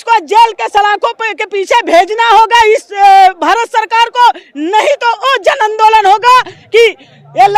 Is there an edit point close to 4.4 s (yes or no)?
no